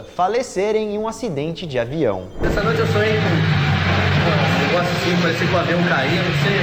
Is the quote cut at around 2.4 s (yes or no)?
no